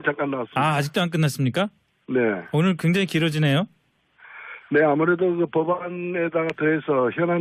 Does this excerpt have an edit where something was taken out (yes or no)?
yes